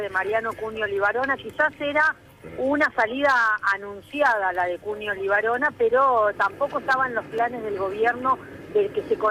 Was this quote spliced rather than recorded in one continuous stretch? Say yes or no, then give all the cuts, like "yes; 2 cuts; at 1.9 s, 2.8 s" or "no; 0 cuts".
no; 0 cuts